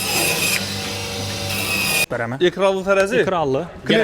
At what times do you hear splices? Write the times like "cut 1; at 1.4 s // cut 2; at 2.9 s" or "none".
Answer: cut 1; at 2.0 s